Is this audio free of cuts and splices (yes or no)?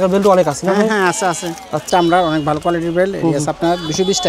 no